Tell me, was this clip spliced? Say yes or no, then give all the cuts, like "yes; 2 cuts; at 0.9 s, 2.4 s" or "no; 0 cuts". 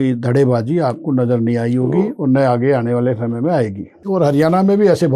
yes; 1 cut; at 4.0 s